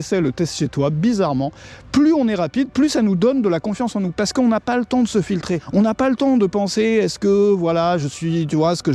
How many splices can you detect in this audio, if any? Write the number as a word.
two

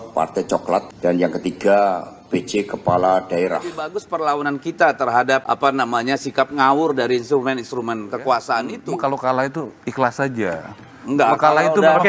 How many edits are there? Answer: four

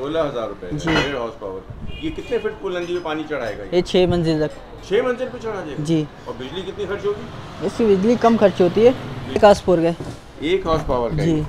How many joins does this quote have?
one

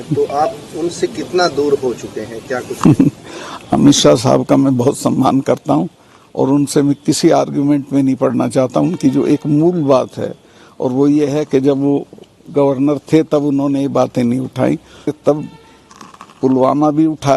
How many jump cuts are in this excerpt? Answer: one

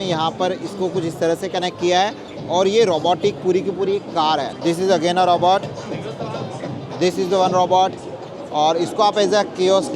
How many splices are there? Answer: one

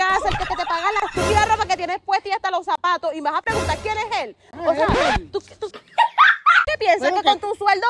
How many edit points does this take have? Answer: zero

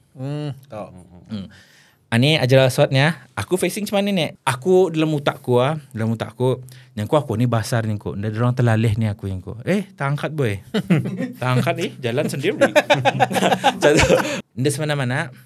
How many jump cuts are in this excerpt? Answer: two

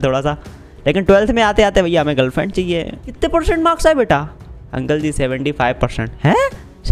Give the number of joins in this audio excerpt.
one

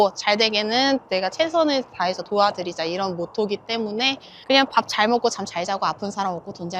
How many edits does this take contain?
zero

